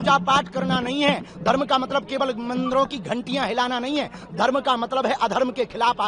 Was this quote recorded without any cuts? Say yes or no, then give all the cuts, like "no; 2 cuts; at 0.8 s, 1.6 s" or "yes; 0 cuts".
yes; 0 cuts